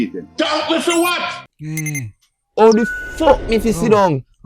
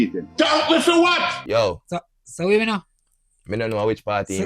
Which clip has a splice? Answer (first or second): second